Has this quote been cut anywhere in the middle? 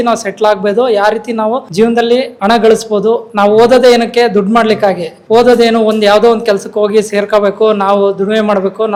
no; 0 cuts

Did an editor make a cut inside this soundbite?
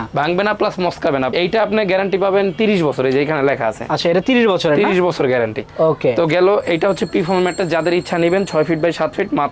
yes; 1 cut; at 1.4 s

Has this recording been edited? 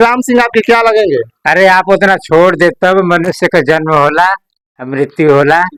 no; 0 cuts

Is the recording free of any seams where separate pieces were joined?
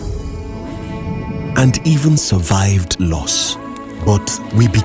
yes; 0 cuts

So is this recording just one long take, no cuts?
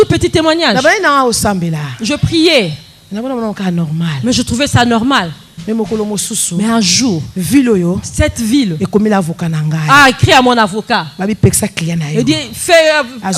yes; 0 cuts

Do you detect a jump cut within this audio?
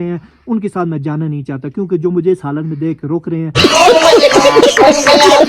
yes; 1 cut; at 3.6 s

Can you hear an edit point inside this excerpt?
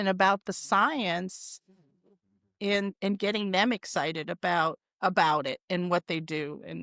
no; 0 cuts

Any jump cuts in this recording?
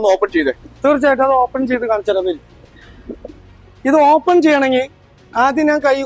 no; 0 cuts

